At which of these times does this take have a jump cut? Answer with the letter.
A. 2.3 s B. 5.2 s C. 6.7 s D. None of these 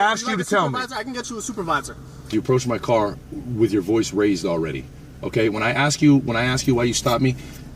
A